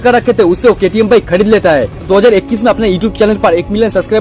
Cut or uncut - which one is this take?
cut